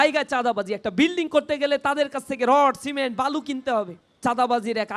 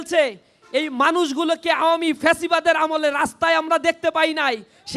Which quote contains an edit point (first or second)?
first